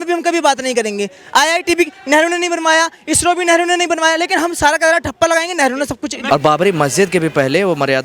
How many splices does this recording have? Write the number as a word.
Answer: one